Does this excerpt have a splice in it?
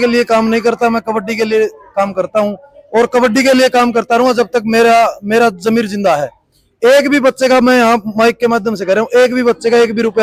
no; 0 cuts

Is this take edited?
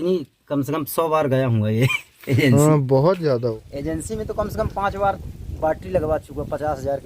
yes; 1 cut; at 3.3 s

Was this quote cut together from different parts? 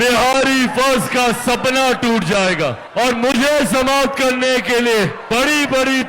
yes; 2 cuts; at 2.8 s, 5.2 s

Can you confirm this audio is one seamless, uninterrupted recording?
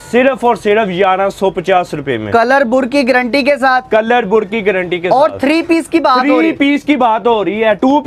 yes; 0 cuts

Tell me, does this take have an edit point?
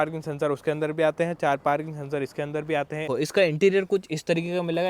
yes; 1 cut; at 3.0 s

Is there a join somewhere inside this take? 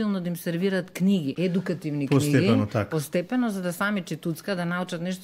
yes; 1 cut; at 1.3 s

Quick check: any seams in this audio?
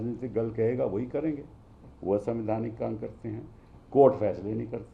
no; 0 cuts

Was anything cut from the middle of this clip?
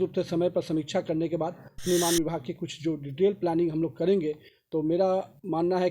yes; 1 cut; at 1.8 s

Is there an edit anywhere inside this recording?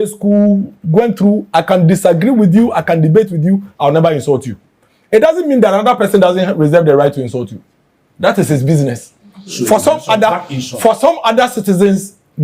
no; 0 cuts

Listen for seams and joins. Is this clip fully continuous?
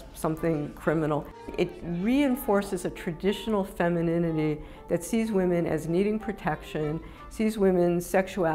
no; 1 cut; at 1.5 s

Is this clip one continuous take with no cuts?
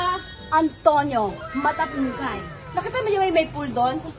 no; 1 cut; at 2.6 s

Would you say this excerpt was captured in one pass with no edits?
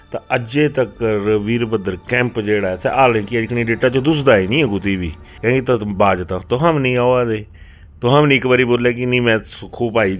no; 1 cut; at 5.2 s

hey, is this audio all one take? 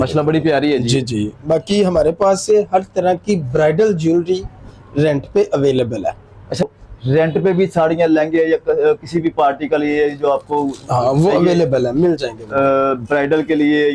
no; 1 cut; at 6.6 s

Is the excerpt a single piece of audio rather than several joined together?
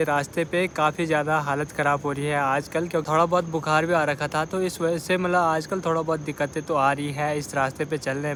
yes; 0 cuts

